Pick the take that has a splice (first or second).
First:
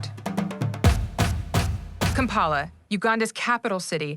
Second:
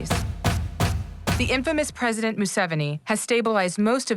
first